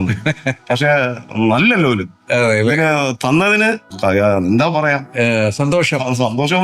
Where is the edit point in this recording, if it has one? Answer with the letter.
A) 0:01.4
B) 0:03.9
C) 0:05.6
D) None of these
B